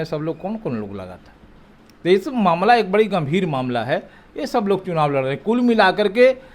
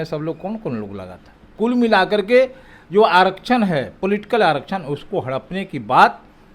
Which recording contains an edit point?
second; 1 cut; at 1.5 s

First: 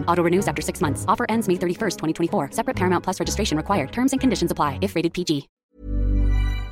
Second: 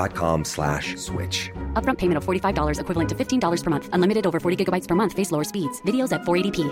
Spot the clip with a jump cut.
first; 1 cut; at 5.5 s

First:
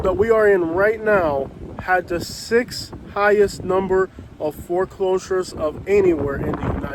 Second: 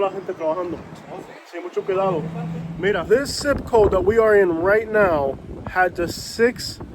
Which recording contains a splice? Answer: second; 1 cut; at 2.8 s

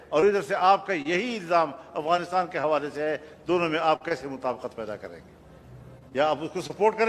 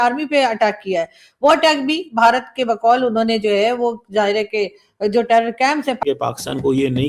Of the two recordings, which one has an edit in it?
second; 1 cut; at 6.0 s

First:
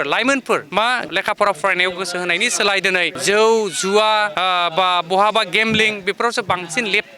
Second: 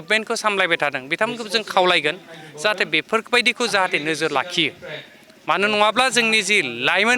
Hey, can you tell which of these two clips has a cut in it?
first; 3 cuts; at 1.0 s, 3.1 s, 4.3 s

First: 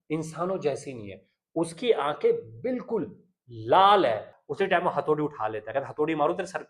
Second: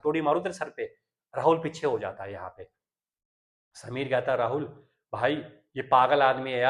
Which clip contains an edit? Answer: first; 1 cut; at 4.4 s

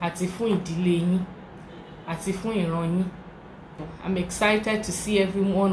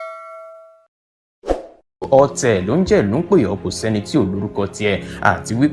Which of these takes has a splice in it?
first; 1 cut; at 3.9 s

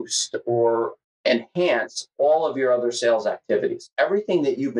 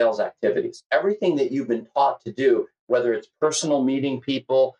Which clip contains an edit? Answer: first; 1 cut; at 0.9 s

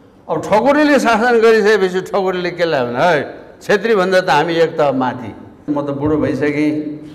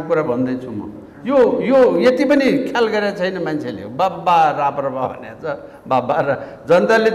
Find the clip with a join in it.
first; 1 cut; at 5.6 s

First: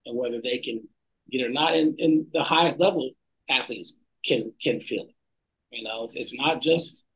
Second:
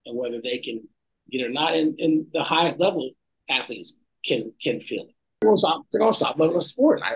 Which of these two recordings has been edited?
second; 1 cut; at 5.4 s

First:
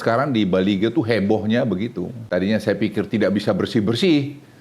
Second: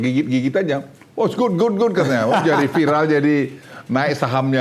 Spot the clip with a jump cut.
first; 1 cut; at 2.1 s

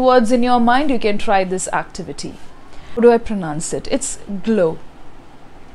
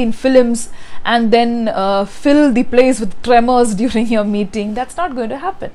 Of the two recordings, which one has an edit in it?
first; 1 cut; at 3.0 s

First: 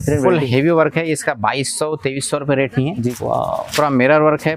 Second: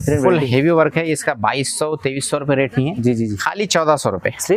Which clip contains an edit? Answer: first; 1 cut; at 3.1 s

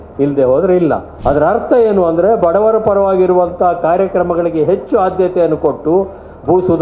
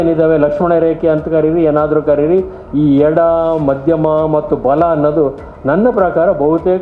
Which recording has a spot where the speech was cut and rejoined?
first; 1 cut; at 1.1 s

